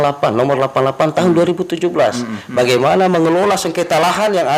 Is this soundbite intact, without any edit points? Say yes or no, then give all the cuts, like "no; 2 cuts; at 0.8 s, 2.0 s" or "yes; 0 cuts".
yes; 0 cuts